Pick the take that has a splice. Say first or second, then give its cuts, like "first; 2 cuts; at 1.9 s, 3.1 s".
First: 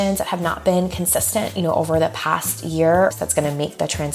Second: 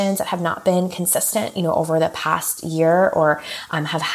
first; 1 cut; at 3.1 s